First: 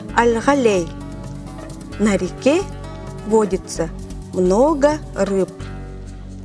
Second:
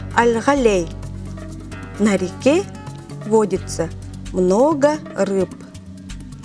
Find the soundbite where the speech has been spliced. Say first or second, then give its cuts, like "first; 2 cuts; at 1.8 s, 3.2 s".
first; 1 cut; at 5.5 s